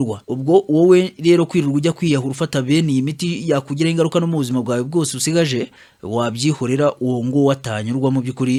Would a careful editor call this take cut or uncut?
uncut